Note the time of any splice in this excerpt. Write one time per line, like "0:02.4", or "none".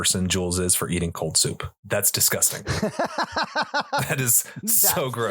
0:01.1